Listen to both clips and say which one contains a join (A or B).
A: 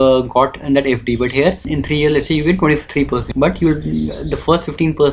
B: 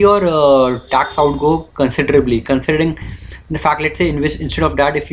A